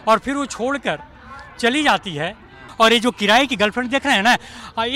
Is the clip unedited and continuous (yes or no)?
no